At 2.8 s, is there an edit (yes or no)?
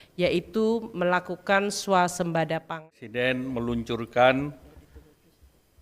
yes